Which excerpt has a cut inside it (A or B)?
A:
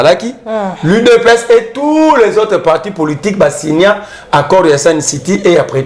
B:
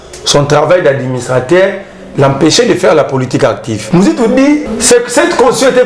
B